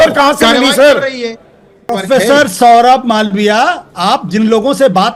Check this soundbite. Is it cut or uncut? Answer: cut